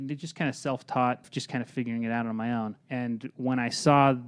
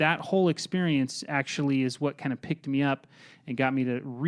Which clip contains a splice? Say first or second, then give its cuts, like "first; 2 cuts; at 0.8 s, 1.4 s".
first; 2 cuts; at 1.3 s, 2.8 s